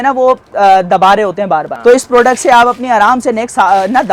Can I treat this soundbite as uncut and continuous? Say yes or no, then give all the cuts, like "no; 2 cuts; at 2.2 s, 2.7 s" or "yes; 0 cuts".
no; 1 cut; at 1.7 s